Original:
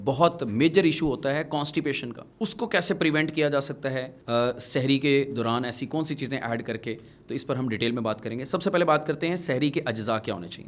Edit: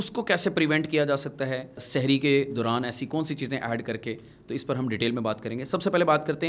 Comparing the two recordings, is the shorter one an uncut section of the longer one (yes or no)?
no